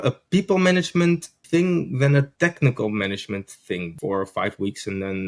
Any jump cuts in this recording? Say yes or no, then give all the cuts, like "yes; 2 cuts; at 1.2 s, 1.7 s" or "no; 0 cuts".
yes; 3 cuts; at 1.4 s, 2.3 s, 3.9 s